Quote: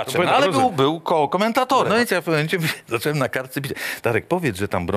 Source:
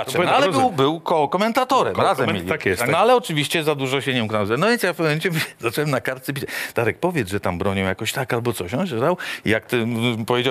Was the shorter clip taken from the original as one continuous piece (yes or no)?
no